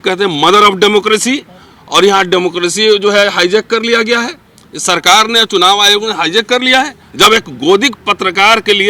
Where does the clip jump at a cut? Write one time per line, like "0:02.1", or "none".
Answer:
0:07.0